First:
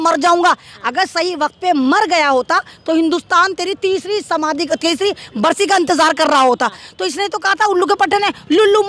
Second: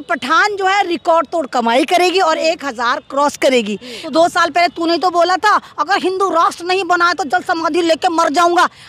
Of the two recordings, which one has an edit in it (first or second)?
second